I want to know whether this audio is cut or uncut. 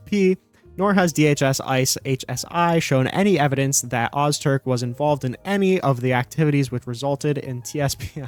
uncut